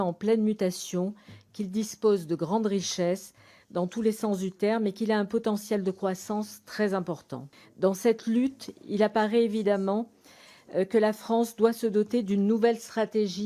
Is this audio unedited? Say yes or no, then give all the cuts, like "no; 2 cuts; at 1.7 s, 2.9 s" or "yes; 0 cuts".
yes; 0 cuts